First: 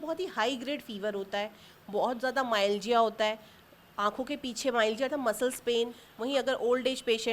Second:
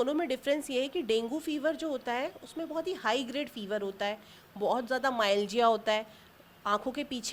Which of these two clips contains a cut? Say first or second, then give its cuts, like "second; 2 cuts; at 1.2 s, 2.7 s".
first; 1 cut; at 6.1 s